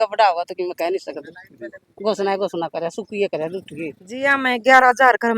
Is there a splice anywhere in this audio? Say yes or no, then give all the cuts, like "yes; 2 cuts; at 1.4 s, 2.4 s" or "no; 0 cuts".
yes; 1 cut; at 4.0 s